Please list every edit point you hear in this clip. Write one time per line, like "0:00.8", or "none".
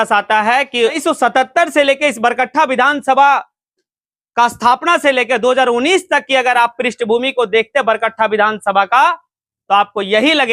0:01.0